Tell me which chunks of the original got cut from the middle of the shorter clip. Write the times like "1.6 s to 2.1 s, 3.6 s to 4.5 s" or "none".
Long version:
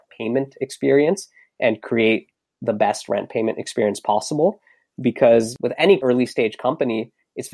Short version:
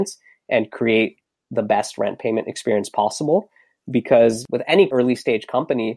none